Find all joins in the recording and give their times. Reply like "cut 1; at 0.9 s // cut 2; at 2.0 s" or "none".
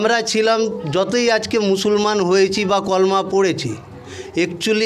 none